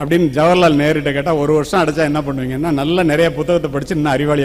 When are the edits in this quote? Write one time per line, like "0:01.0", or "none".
none

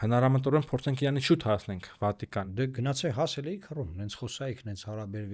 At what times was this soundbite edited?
0:02.5

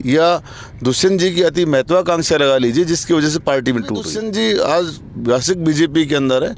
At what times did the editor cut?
0:04.1

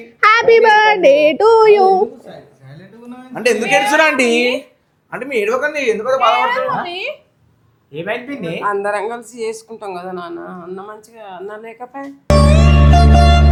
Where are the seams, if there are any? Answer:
none

